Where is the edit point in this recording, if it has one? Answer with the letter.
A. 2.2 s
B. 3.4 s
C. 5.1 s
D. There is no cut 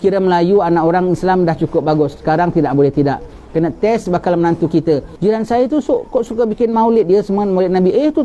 C